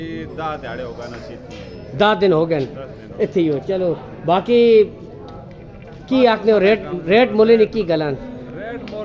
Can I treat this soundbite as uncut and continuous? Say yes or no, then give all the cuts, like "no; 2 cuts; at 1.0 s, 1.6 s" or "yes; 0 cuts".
yes; 0 cuts